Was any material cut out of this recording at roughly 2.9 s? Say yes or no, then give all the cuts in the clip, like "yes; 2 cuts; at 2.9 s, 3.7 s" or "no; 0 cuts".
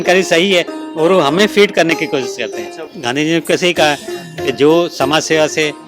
yes; 1 cut; at 2.9 s